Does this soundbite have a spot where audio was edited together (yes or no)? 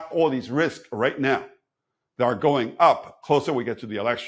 no